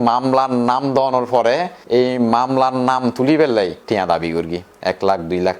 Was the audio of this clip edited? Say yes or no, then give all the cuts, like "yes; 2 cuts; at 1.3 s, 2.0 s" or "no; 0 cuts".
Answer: yes; 2 cuts; at 1.7 s, 3.8 s